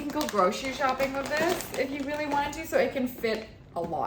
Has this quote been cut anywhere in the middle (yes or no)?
no